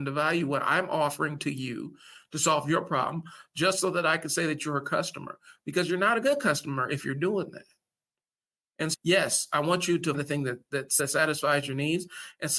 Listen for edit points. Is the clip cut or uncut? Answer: cut